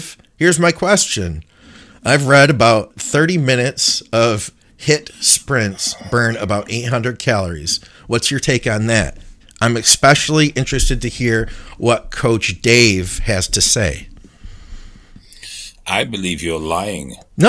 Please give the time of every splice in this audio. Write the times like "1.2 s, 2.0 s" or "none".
2.9 s